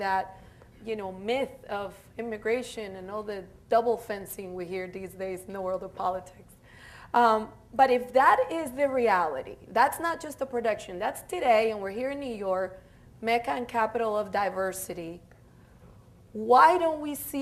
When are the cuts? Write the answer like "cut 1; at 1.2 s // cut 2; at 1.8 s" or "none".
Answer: none